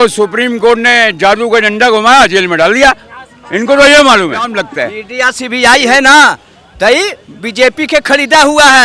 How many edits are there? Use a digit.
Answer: 1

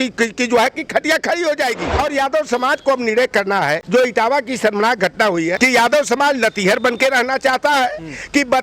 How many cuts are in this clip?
3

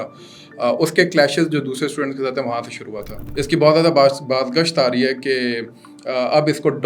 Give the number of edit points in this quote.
1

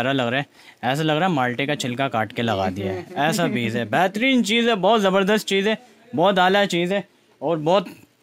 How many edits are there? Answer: 0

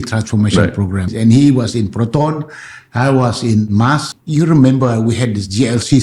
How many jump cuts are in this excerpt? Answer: 2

